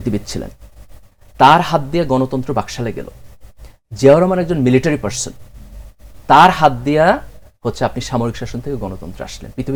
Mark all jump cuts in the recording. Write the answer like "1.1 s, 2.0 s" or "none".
none